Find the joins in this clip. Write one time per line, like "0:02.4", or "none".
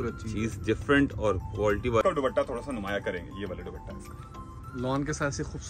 0:02.0